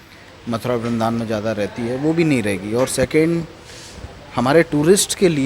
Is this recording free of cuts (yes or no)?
yes